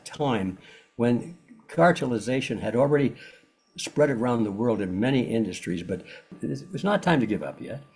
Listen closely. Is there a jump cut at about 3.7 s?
no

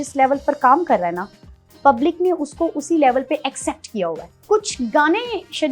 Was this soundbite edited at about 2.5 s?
no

